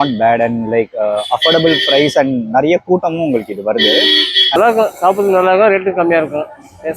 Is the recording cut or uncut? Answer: cut